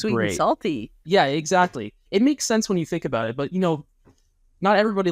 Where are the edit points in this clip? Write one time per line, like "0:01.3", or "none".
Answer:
0:00.9